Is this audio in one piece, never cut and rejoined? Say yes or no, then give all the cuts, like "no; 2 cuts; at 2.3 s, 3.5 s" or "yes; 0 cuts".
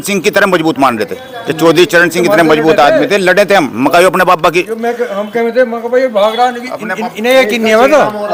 yes; 0 cuts